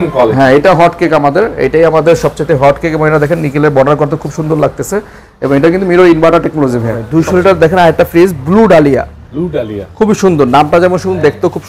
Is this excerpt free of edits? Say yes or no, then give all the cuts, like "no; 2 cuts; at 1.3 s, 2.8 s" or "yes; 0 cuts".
no; 1 cut; at 7.0 s